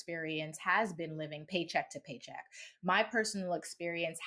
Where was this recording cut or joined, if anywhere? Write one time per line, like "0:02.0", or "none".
0:01.4